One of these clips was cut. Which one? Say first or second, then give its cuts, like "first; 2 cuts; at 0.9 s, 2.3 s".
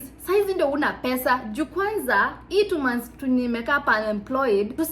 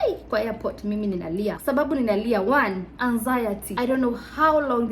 second; 2 cuts; at 1.6 s, 3.7 s